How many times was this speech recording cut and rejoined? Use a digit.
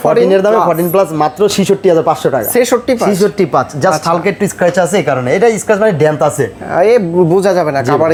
0